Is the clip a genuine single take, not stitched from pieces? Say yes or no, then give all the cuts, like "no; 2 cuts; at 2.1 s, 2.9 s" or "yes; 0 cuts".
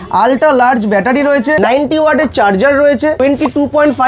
no; 2 cuts; at 1.6 s, 3.2 s